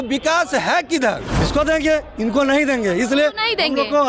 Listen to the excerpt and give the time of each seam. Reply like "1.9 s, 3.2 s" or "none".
1.3 s